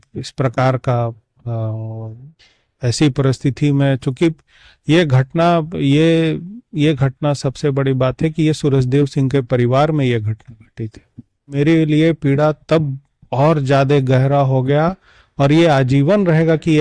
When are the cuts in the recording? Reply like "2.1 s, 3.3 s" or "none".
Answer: 11.6 s